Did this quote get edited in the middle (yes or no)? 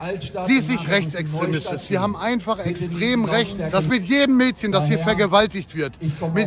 yes